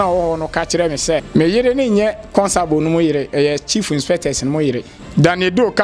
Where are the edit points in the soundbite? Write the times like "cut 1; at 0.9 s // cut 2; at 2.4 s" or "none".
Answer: cut 1; at 1.3 s // cut 2; at 4.9 s